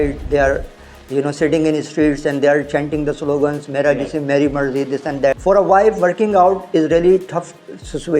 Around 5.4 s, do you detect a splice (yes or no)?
yes